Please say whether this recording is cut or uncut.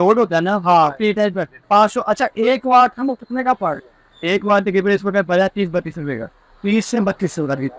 cut